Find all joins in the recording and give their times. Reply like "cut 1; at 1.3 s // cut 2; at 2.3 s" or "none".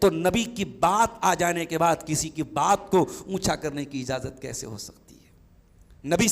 none